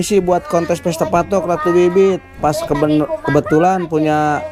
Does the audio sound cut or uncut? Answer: uncut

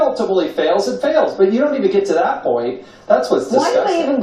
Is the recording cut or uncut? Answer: uncut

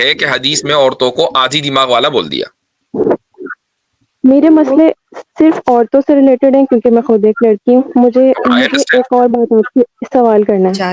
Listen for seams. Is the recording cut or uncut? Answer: uncut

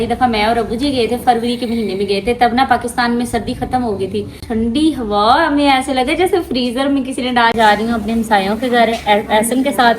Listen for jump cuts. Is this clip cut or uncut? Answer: cut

